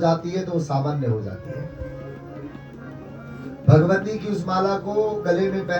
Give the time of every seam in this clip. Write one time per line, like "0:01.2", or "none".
none